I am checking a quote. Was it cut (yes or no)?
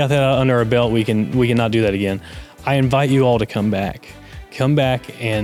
no